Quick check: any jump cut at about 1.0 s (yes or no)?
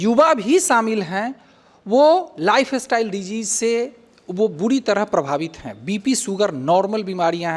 no